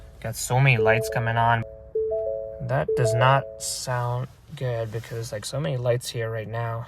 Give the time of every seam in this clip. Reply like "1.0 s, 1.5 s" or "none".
1.6 s